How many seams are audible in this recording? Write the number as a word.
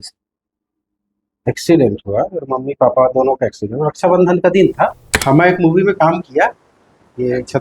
one